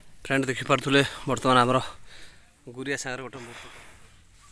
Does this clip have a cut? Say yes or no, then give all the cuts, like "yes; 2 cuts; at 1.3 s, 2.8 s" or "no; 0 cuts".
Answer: yes; 1 cut; at 3.5 s